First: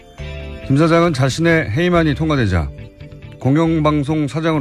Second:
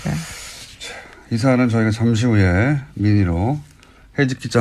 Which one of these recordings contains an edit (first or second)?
second